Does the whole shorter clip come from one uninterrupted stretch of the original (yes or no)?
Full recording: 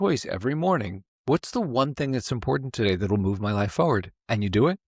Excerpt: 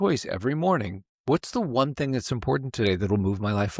yes